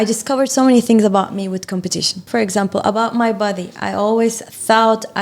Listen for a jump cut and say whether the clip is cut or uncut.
cut